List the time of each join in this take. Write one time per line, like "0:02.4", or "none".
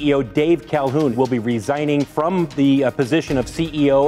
0:01.1
0:02.1